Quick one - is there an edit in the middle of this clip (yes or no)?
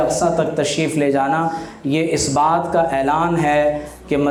no